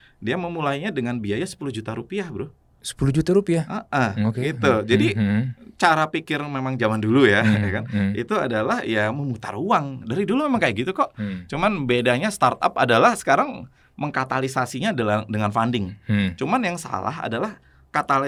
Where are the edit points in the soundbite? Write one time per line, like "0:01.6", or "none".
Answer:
none